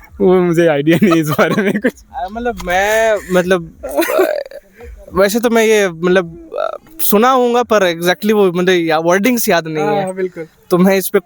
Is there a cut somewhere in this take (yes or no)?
no